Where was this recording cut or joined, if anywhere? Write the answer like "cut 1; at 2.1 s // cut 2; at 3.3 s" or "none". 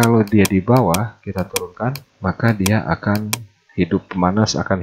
cut 1; at 2.1 s